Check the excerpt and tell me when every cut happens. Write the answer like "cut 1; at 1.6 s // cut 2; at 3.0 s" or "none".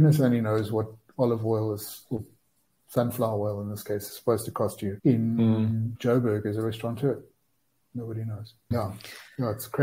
cut 1; at 4.9 s // cut 2; at 5.9 s // cut 3; at 8.7 s